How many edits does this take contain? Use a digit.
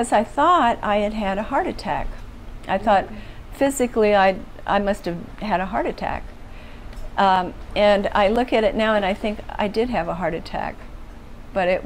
0